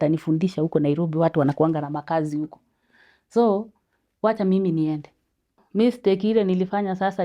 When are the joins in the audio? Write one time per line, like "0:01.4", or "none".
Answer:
0:05.6